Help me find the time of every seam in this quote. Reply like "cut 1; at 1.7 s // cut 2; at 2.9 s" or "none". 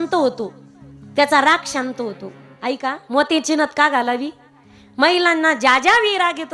cut 1; at 3.1 s